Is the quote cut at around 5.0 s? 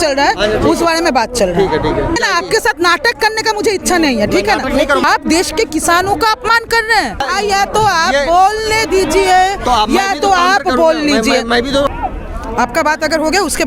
yes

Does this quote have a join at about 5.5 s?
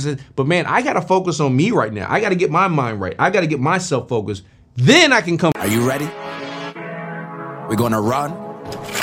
yes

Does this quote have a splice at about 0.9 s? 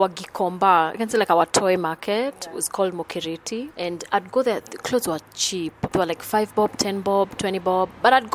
no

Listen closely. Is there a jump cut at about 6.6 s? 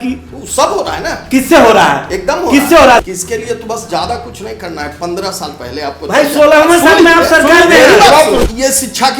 no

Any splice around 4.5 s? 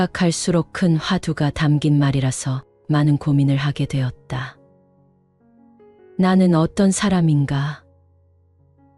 yes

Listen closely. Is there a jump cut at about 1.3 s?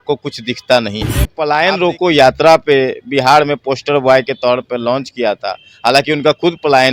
yes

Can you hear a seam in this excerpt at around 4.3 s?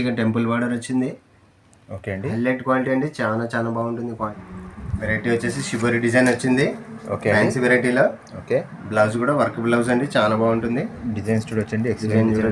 yes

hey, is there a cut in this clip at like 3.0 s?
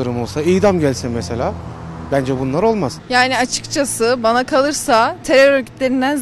yes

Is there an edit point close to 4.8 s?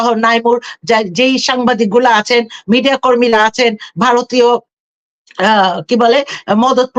no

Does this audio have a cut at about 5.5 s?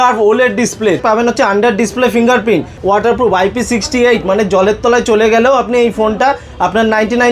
no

